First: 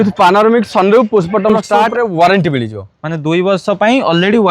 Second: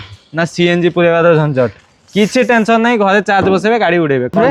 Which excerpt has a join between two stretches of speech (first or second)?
first